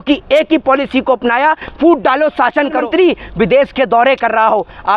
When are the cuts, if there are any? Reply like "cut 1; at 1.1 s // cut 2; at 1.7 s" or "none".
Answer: cut 1; at 2.8 s